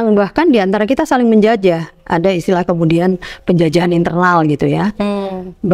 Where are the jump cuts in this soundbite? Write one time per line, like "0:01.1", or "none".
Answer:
none